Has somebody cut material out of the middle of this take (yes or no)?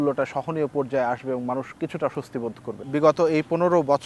yes